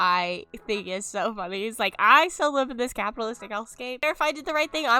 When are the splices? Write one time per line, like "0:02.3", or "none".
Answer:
0:04.0